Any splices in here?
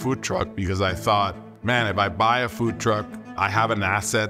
yes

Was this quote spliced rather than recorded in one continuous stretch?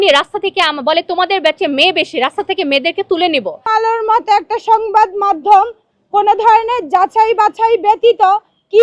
yes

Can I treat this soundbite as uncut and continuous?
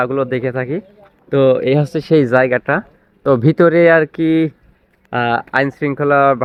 yes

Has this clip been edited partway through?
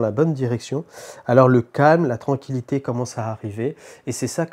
no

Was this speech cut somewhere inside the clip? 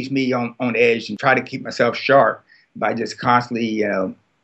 yes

